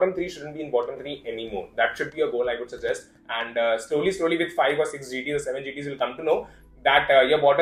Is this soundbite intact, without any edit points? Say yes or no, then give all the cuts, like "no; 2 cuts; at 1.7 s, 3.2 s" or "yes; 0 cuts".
yes; 0 cuts